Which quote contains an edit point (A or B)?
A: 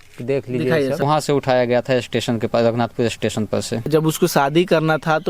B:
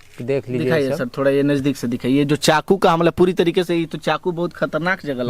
A